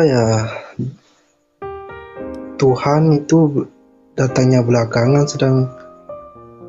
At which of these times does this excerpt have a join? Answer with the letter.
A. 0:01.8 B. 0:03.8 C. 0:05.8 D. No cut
C